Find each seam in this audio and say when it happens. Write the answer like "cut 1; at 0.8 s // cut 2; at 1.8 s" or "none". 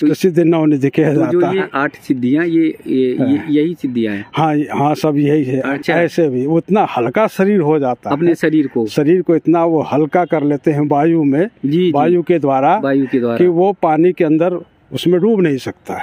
cut 1; at 1.7 s // cut 2; at 5.7 s